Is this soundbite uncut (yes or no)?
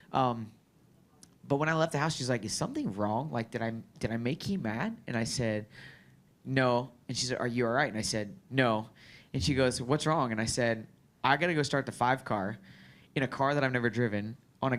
yes